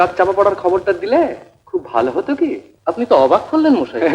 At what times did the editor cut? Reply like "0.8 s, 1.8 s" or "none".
2.7 s